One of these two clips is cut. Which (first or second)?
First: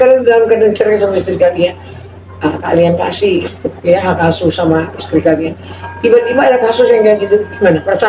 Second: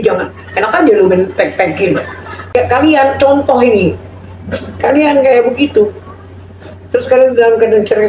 second